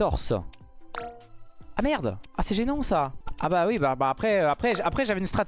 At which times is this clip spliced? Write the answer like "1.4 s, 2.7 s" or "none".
2.2 s, 3.2 s